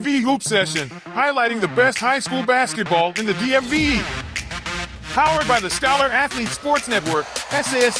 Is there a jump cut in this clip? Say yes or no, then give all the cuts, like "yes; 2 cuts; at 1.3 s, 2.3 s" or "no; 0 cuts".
no; 0 cuts